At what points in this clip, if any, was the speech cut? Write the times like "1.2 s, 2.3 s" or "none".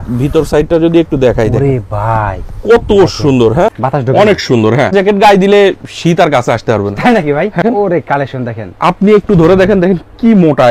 3.8 s, 4.9 s, 7.6 s